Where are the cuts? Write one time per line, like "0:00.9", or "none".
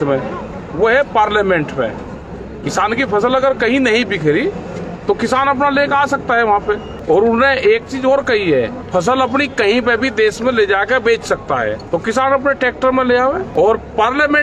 0:06.9
0:08.8
0:11.8
0:13.5